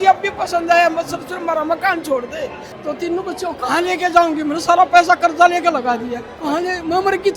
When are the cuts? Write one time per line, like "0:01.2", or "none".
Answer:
0:02.7
0:06.3